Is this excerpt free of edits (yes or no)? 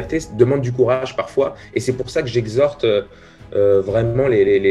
yes